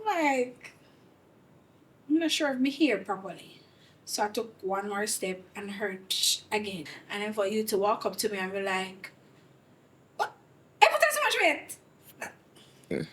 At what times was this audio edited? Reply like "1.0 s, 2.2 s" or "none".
6.8 s

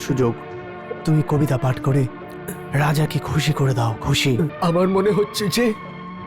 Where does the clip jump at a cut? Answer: 4.5 s

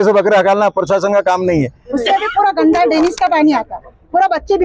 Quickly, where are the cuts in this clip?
1.8 s

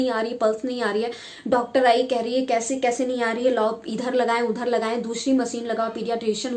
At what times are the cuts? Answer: none

